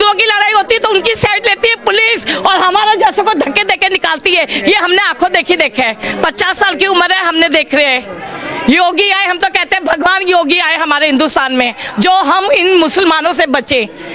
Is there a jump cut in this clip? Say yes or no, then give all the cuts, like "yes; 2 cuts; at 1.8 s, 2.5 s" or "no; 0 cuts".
no; 0 cuts